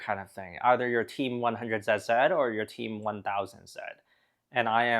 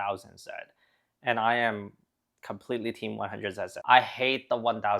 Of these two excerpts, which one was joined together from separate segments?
second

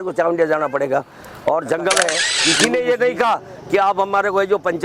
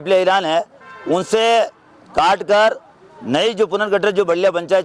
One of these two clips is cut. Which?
first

